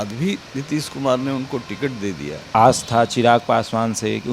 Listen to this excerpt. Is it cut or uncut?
cut